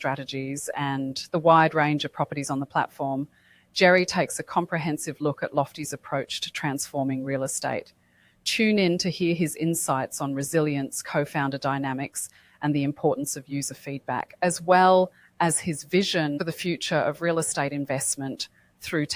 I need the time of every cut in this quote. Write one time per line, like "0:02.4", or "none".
0:16.4